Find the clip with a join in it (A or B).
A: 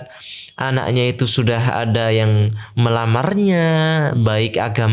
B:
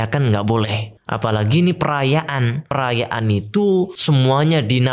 B